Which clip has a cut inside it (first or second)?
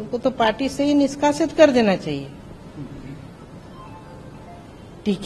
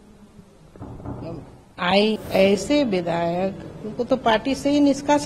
second